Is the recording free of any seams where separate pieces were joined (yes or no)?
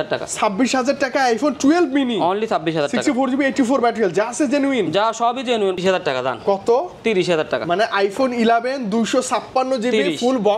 no